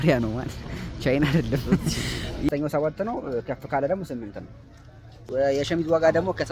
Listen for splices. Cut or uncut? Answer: cut